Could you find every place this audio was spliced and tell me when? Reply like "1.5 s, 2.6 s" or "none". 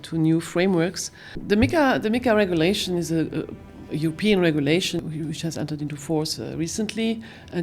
1.4 s, 5.0 s